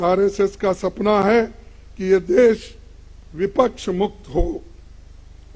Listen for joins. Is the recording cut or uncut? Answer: uncut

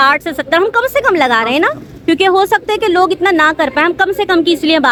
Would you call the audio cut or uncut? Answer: uncut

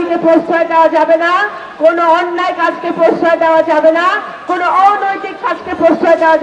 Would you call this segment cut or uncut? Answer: uncut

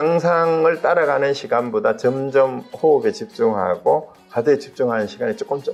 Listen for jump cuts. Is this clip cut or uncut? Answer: uncut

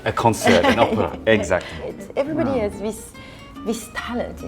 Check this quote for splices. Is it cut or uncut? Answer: cut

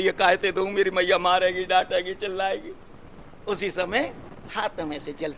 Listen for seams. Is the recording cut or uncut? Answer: uncut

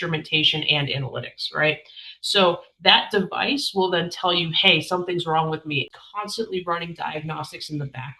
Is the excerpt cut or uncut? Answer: cut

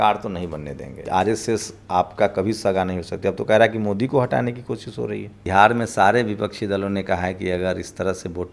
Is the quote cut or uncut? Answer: cut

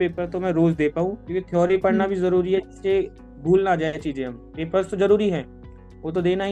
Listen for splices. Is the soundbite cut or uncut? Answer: cut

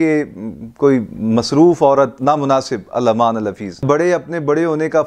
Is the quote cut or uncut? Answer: cut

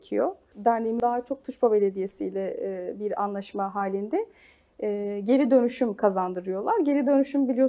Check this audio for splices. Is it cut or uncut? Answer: cut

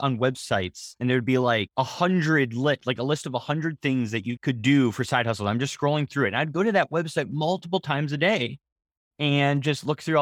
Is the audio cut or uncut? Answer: uncut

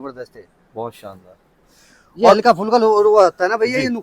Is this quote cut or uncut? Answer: uncut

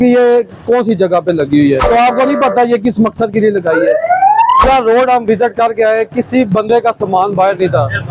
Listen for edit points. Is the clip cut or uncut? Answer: cut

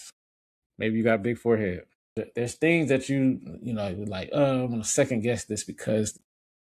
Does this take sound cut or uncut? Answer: cut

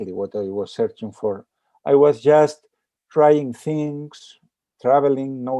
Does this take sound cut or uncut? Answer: uncut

